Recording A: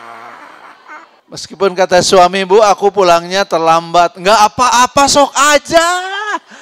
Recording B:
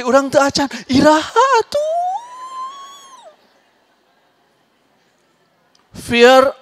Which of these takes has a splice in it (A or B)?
A